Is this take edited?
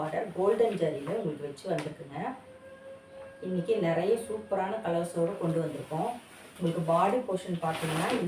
no; 0 cuts

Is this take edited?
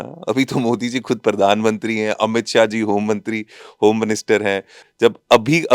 yes; 1 cut; at 4.8 s

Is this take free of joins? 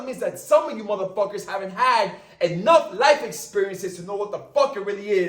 yes; 0 cuts

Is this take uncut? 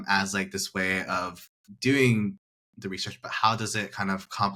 yes; 0 cuts

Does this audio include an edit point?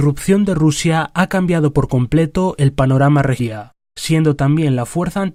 no; 0 cuts

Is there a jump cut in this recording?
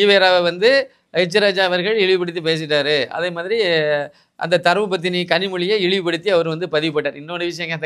no; 0 cuts

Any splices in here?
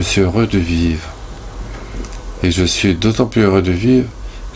no; 0 cuts

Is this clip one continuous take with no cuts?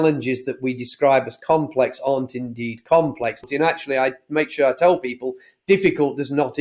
no; 1 cut; at 3.4 s

